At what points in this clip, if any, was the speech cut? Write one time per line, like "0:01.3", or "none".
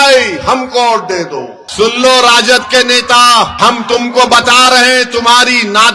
0:01.6
0:03.5